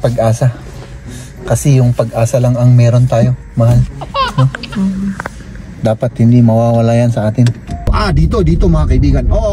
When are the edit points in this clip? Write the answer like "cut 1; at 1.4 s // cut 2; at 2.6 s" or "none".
cut 1; at 7.9 s